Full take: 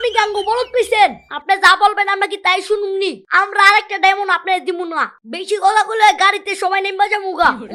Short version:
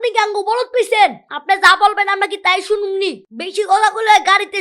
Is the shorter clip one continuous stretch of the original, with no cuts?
no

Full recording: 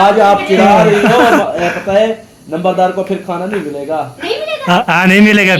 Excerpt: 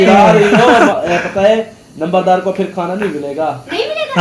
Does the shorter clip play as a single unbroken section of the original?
yes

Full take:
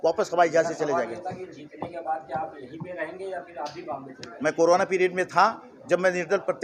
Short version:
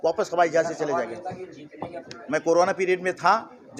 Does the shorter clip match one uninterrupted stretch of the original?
no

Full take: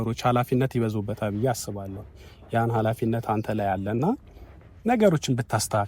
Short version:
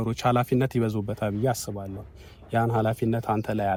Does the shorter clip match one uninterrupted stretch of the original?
yes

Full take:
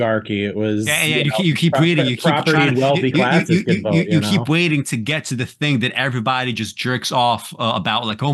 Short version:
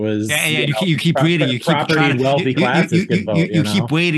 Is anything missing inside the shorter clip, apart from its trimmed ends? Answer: no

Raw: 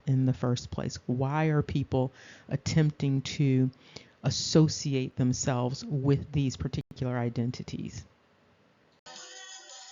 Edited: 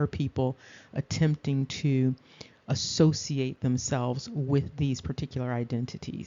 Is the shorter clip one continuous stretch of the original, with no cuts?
no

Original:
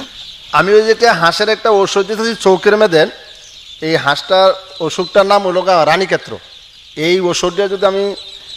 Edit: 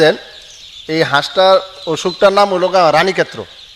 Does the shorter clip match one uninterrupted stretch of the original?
yes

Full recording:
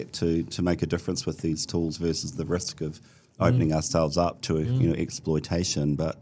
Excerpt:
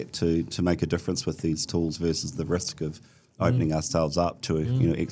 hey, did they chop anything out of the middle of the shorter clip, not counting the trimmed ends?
no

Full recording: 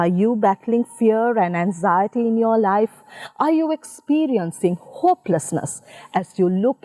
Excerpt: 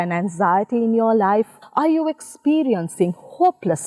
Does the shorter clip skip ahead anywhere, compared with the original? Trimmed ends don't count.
yes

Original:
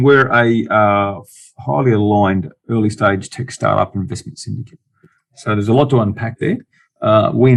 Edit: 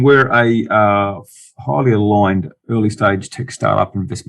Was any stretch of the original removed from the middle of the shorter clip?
no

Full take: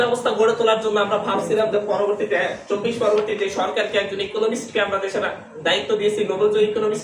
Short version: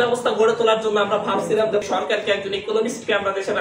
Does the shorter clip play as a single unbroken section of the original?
no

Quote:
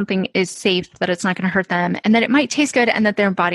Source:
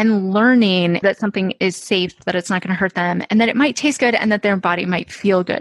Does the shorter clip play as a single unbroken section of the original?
yes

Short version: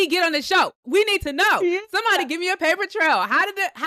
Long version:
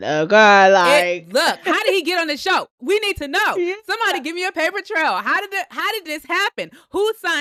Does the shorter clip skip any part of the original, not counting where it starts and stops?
no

